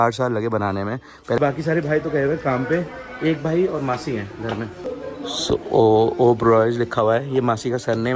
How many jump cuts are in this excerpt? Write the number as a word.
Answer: one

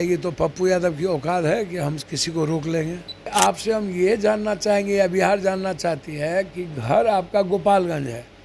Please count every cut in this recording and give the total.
one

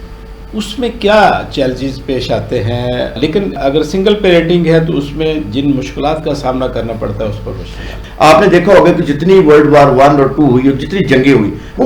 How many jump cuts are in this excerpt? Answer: two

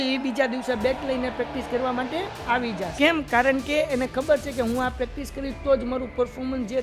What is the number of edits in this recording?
one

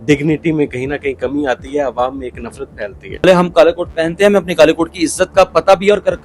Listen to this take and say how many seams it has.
one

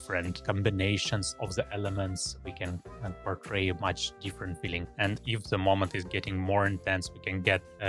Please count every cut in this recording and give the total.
one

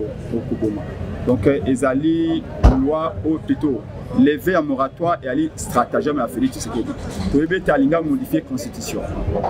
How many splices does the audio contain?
zero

